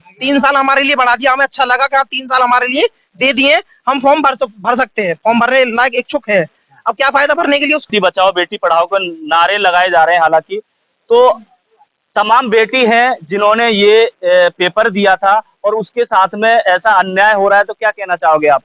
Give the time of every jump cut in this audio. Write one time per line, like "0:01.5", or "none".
none